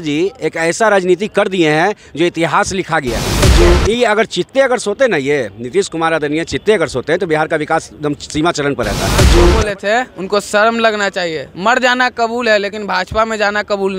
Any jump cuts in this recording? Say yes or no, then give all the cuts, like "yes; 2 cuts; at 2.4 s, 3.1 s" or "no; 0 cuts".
yes; 2 cuts; at 3.5 s, 9.3 s